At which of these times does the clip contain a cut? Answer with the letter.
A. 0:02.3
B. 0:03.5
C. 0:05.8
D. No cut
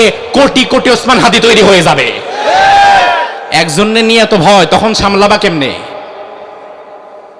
D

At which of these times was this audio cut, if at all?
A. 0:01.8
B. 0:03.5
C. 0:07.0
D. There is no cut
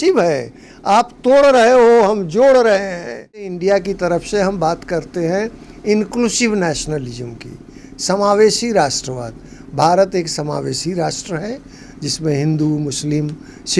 B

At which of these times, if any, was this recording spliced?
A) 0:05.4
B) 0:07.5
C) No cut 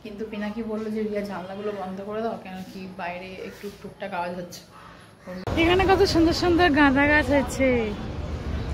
A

